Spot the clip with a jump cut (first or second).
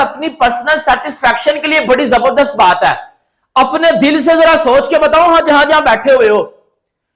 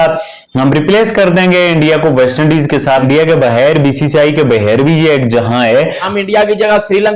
second